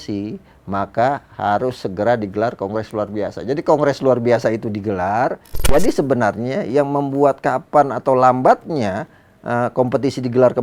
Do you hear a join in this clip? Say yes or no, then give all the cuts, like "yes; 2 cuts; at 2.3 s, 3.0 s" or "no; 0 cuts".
yes; 1 cut; at 5.5 s